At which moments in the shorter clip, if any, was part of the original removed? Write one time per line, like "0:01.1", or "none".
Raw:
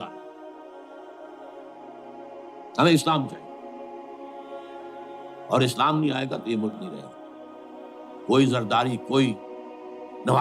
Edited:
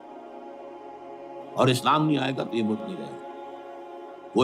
0:01.0